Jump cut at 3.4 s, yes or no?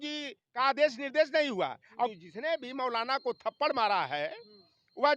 no